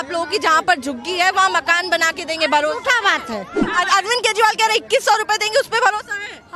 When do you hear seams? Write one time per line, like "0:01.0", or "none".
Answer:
0:03.6

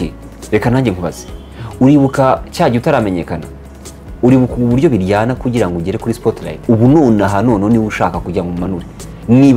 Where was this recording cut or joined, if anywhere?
0:06.6

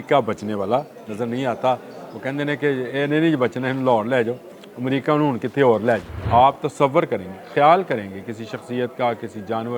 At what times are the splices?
0:06.2

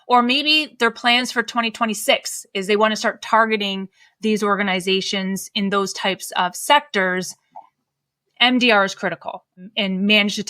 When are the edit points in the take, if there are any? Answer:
0:09.5

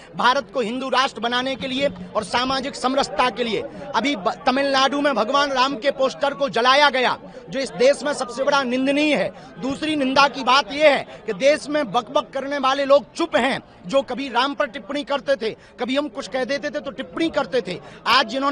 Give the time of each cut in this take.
none

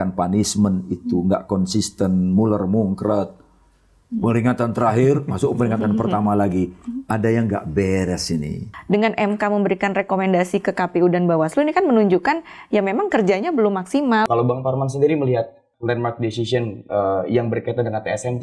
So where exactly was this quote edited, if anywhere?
0:08.6
0:14.2
0:15.7

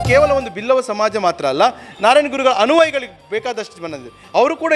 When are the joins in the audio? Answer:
none

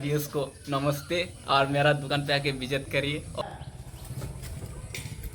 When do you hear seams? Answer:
0:03.4

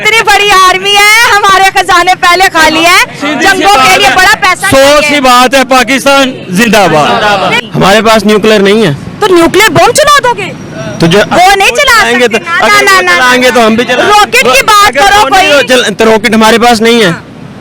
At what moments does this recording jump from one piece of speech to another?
0:07.6

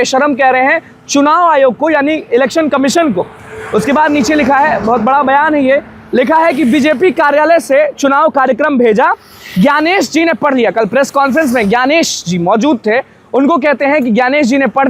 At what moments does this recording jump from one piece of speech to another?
none

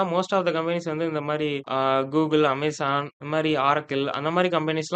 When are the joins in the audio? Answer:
none

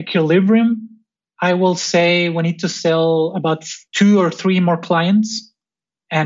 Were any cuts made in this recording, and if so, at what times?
0:03.7

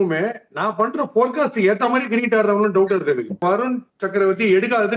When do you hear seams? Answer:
0:03.4

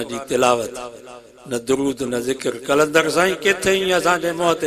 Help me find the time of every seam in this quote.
none

